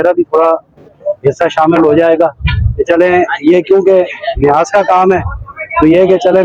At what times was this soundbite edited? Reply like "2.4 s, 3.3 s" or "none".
none